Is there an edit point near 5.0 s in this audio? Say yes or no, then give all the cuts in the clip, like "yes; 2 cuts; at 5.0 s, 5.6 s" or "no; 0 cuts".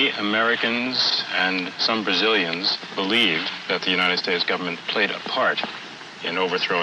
yes; 1 cut; at 5.0 s